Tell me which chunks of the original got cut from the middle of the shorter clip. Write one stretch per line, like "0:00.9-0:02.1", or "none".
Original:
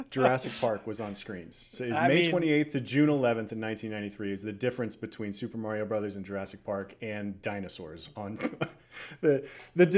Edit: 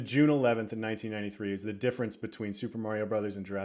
none